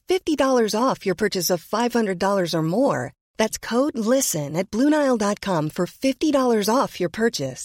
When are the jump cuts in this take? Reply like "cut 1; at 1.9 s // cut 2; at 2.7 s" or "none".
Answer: none